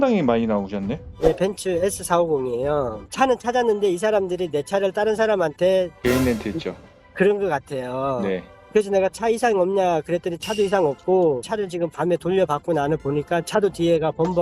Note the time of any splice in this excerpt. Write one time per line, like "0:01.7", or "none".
0:03.0